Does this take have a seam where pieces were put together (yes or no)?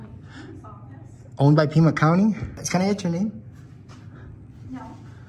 yes